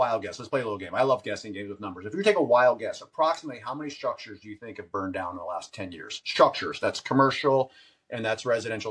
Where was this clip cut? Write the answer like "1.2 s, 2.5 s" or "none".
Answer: none